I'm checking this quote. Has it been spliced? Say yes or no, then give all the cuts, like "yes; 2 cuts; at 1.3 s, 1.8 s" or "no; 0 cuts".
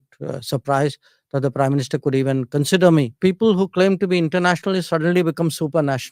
yes; 1 cut; at 3.1 s